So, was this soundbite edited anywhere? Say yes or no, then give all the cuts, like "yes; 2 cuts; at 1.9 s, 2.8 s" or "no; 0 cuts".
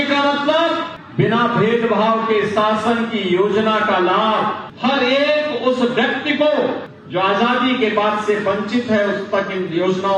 yes; 3 cuts; at 1.0 s, 4.7 s, 6.9 s